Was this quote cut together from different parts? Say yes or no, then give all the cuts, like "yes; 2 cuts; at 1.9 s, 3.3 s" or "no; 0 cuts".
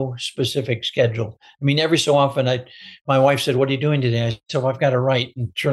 no; 0 cuts